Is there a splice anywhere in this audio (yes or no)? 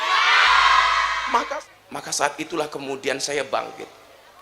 yes